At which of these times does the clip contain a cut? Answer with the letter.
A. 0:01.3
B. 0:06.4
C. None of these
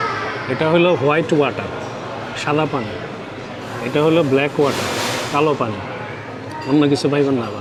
C